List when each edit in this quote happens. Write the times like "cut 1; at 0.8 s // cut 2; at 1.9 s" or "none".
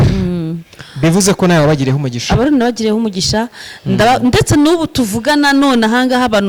none